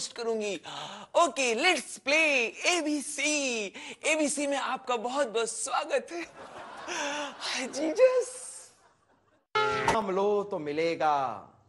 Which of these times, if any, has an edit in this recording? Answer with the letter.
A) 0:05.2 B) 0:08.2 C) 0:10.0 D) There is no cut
C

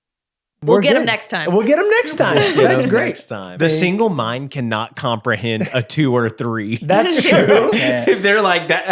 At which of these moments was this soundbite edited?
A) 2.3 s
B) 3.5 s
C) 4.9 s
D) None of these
B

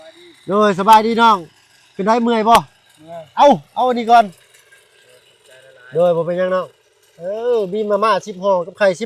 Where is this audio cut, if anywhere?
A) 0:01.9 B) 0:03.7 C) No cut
C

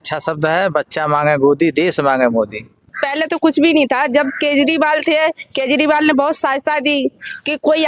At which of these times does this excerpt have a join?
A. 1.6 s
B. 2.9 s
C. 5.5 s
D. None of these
B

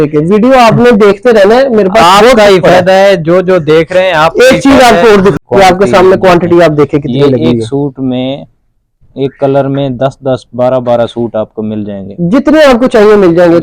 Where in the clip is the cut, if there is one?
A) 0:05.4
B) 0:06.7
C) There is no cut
A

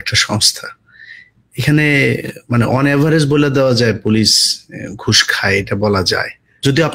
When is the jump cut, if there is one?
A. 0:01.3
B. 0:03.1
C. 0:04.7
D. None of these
D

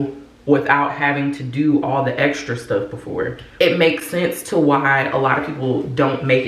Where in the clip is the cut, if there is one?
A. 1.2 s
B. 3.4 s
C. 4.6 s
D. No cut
B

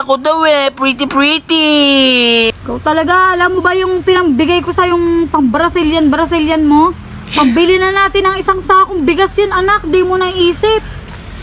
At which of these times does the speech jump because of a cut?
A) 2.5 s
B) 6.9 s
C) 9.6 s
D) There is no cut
A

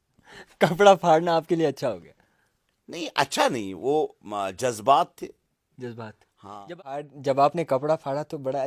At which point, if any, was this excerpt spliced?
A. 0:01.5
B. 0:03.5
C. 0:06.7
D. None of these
C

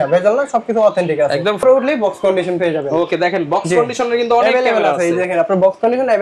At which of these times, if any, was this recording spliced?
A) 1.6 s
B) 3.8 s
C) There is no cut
A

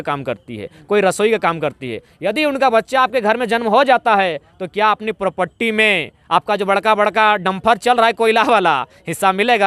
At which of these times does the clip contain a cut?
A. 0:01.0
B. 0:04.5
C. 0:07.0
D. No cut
D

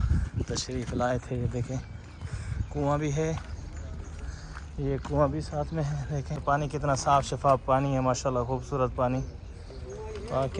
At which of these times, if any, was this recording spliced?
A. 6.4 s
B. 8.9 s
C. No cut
A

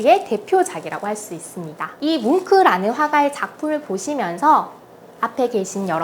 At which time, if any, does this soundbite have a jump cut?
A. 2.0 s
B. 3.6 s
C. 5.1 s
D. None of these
A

